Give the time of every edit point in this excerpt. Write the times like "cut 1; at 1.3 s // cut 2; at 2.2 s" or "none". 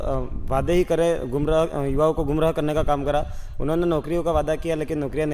none